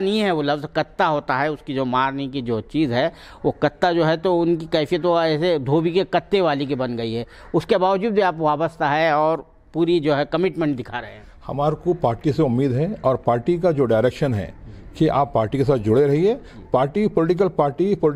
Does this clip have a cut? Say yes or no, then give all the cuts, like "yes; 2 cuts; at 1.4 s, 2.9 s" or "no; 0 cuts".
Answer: no; 0 cuts